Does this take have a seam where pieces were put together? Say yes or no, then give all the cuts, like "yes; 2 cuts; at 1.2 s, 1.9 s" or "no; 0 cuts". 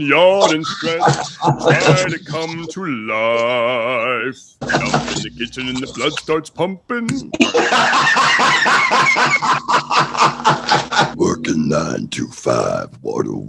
yes; 2 cuts; at 4.6 s, 11.1 s